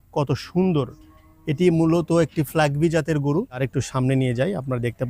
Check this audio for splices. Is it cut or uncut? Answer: cut